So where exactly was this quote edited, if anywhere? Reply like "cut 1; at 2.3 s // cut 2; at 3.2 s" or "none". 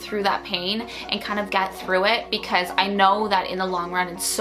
none